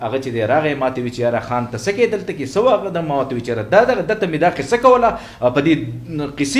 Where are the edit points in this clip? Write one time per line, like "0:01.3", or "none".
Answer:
none